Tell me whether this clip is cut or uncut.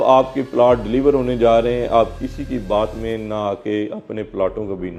uncut